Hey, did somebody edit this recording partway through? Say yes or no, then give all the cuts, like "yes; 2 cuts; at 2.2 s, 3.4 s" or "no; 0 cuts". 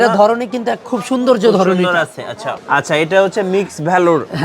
yes; 1 cut; at 2.5 s